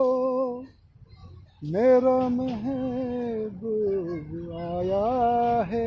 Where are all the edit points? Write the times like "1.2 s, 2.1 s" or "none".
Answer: none

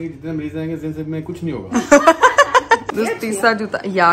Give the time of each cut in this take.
2.9 s

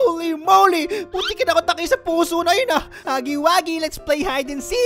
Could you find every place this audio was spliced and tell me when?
3.0 s

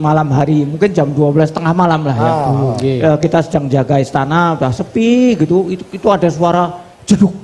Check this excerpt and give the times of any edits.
none

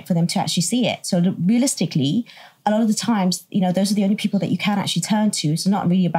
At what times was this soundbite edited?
none

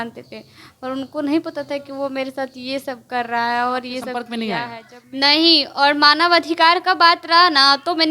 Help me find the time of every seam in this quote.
4.1 s

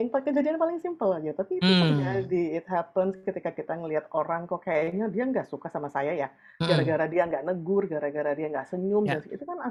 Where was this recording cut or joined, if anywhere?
none

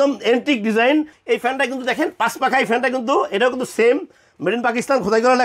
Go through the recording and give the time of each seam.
1.1 s

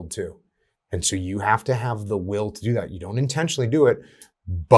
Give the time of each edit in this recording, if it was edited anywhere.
none

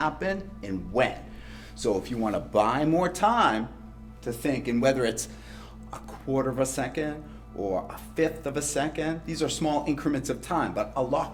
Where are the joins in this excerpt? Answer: none

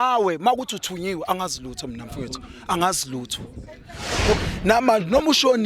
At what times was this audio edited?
4.3 s

